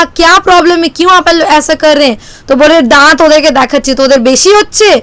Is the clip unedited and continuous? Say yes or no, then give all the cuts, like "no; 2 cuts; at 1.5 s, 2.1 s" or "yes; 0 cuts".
yes; 0 cuts